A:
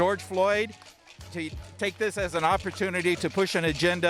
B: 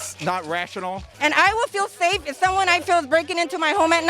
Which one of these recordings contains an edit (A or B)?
B